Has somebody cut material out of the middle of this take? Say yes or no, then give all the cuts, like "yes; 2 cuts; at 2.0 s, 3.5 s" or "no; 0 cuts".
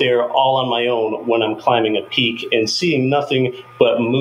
no; 0 cuts